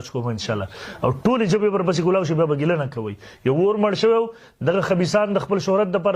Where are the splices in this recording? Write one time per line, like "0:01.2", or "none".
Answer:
none